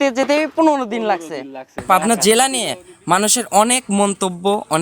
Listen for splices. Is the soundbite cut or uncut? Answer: cut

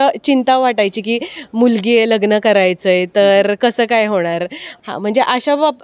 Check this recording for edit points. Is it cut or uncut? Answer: uncut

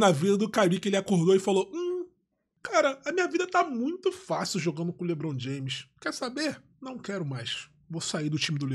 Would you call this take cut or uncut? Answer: uncut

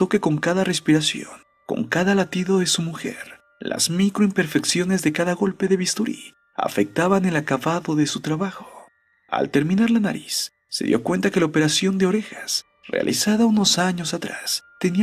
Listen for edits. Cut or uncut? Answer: cut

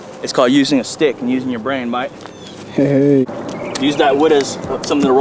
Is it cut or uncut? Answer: cut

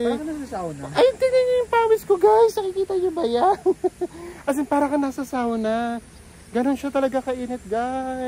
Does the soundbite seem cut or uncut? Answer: uncut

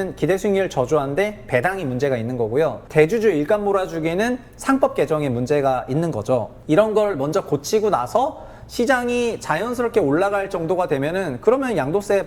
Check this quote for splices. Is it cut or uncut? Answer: cut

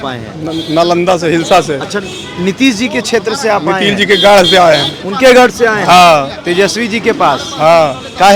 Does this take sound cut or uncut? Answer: uncut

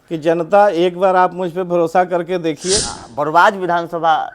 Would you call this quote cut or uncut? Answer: cut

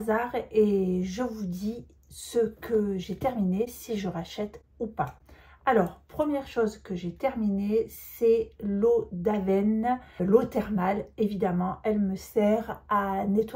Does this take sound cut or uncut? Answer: cut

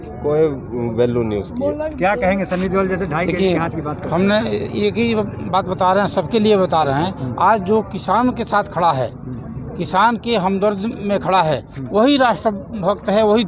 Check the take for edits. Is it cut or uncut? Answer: uncut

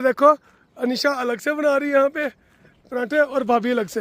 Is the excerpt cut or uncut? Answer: uncut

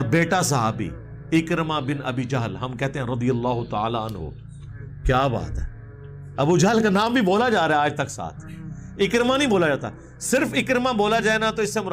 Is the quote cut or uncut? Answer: uncut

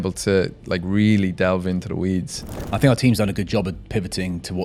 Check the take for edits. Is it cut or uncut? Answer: cut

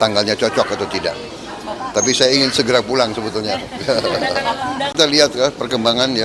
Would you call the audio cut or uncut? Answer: cut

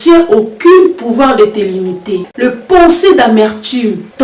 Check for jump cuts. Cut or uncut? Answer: cut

